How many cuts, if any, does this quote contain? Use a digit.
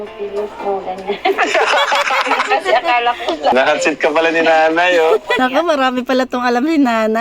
2